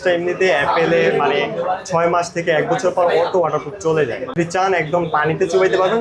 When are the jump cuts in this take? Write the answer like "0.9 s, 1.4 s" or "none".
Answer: 4.4 s